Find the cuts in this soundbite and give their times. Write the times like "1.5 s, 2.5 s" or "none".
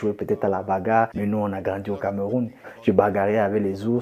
1.1 s, 2.6 s